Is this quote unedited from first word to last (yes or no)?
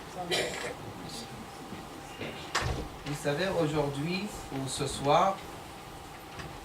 no